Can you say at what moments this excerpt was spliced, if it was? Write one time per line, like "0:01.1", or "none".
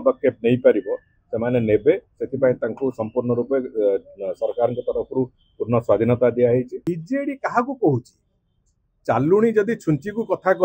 0:06.8